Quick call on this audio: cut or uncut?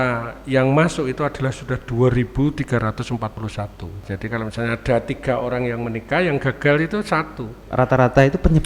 cut